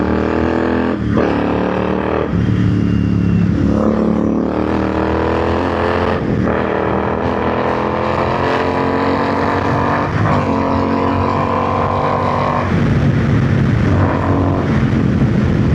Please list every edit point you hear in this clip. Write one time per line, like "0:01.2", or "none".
none